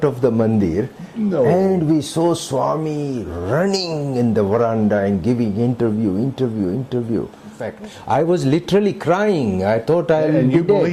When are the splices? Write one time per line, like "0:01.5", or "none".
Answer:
0:07.6